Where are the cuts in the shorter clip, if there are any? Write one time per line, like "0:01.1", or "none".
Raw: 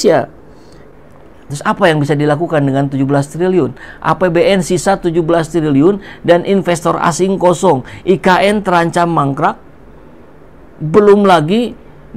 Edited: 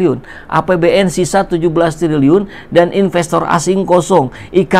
none